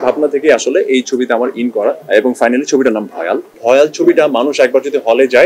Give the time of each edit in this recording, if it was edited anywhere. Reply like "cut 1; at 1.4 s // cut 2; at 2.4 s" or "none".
cut 1; at 2.0 s // cut 2; at 3.6 s

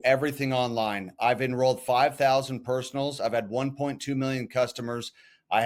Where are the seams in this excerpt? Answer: none

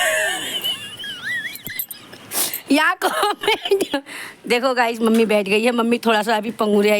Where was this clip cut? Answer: cut 1; at 3.9 s

